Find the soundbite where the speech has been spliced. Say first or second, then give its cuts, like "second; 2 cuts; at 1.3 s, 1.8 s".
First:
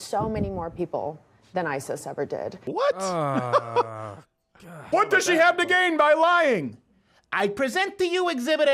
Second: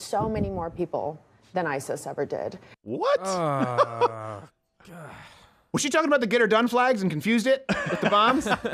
first; 2 cuts; at 2.6 s, 4.9 s